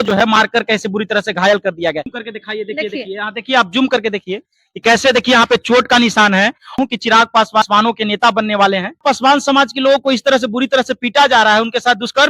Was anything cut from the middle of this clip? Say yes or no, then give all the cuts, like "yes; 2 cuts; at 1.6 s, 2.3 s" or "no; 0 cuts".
yes; 4 cuts; at 2.1 s, 6.8 s, 7.7 s, 9.0 s